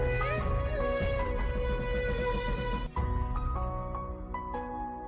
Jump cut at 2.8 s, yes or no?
yes